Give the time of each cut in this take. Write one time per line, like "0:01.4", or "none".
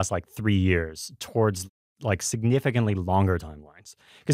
0:01.9